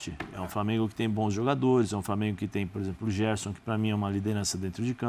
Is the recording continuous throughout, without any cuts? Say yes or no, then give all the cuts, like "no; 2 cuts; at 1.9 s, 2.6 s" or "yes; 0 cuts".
yes; 0 cuts